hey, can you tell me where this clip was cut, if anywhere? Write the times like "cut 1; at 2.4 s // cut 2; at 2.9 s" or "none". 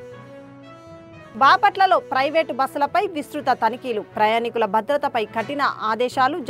cut 1; at 1.3 s